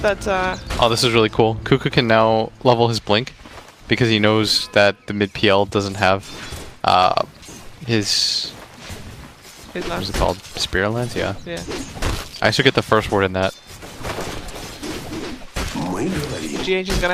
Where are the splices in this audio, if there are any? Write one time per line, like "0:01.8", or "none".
none

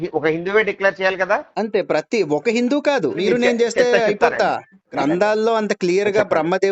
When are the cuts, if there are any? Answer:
0:03.2
0:04.9

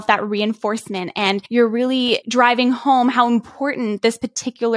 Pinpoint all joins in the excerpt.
0:01.4
0:02.2

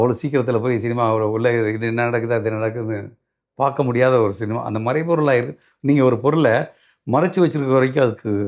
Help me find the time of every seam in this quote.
none

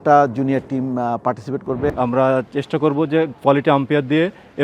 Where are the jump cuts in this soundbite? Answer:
0:01.9

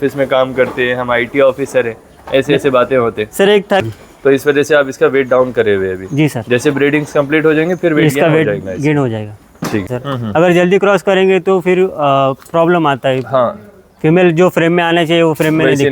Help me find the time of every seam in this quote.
0:03.9
0:10.0

